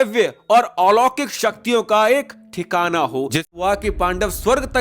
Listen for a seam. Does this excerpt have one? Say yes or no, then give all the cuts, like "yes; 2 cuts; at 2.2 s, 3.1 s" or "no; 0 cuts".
yes; 1 cut; at 3.5 s